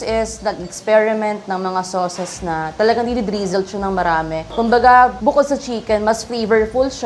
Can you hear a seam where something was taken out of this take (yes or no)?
no